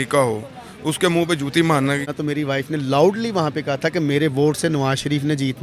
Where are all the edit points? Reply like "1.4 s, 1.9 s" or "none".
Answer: 2.1 s